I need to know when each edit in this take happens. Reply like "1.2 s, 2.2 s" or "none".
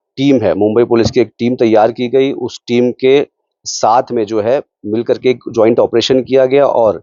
none